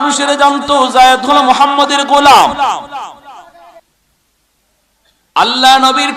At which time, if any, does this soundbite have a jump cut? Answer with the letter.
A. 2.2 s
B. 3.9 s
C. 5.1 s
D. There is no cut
B